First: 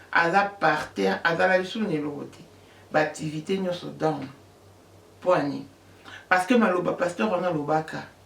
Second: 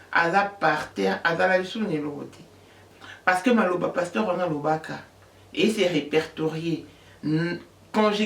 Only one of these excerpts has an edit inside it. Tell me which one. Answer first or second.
second